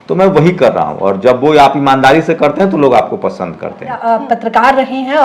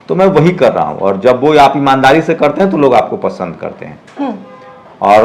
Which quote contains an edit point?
first; 1 cut; at 4.0 s

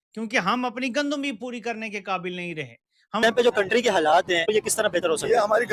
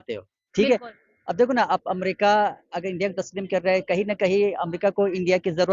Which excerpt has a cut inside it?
first; 1 cut; at 3.2 s

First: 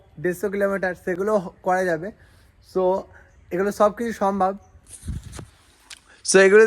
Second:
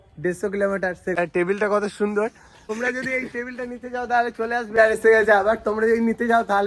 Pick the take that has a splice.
second; 3 cuts; at 1.1 s, 2.8 s, 4.7 s

